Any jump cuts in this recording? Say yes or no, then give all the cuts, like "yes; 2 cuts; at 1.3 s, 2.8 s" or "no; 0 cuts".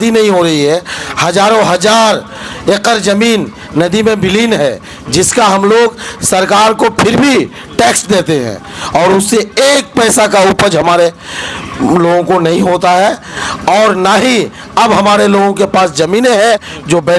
no; 0 cuts